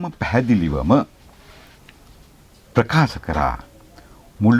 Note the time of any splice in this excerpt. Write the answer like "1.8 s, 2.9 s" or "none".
none